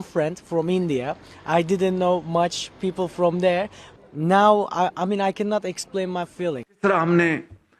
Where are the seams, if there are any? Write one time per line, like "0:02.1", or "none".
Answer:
0:03.8
0:06.7